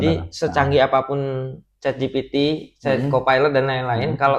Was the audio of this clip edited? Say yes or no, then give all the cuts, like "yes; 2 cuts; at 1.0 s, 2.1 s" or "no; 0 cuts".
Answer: no; 0 cuts